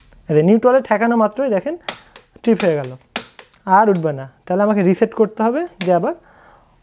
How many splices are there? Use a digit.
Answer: 0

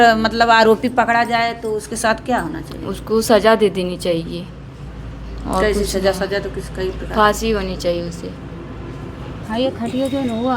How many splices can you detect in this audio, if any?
1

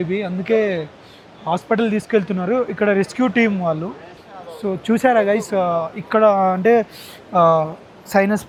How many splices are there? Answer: 0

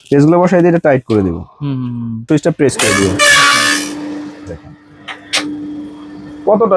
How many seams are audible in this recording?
1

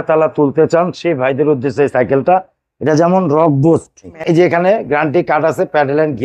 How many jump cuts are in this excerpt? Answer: 1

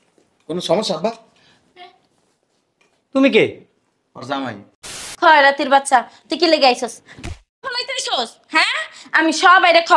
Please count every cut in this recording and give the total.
1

